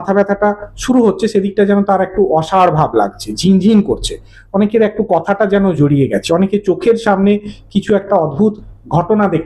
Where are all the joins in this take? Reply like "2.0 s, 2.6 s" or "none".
none